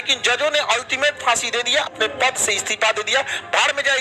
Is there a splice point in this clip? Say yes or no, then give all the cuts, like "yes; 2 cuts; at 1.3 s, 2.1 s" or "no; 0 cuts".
yes; 1 cut; at 1.9 s